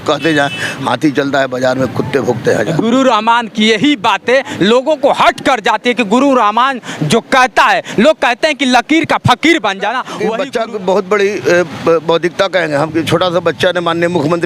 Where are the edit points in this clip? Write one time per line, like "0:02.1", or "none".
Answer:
0:10.2